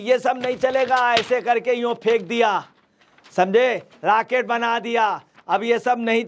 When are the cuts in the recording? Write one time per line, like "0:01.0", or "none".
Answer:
none